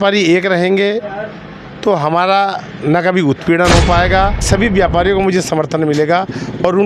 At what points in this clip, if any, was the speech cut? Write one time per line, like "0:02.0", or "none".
0:04.5